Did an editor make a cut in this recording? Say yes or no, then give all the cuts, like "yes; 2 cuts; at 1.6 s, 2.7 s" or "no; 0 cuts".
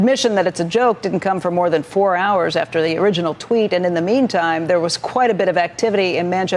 no; 0 cuts